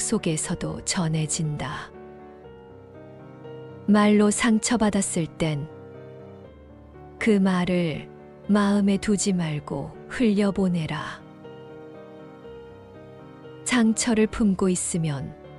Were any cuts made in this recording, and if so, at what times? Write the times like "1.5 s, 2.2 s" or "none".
none